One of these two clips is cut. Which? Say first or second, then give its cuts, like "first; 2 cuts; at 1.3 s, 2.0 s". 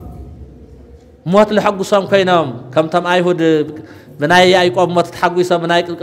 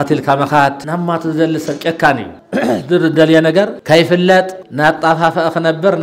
second; 4 cuts; at 0.8 s, 2.4 s, 3.8 s, 4.6 s